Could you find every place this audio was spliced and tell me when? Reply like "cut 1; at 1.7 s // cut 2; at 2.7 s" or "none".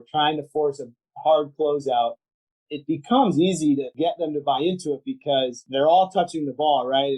cut 1; at 2.6 s // cut 2; at 3.9 s // cut 3; at 5.6 s